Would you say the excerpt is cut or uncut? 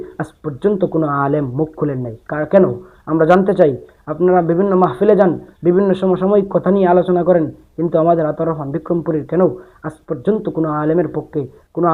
uncut